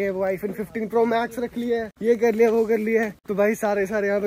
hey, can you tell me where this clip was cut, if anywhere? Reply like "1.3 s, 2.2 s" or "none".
none